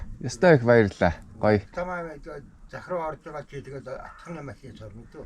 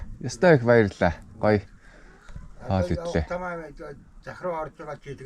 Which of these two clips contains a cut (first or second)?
first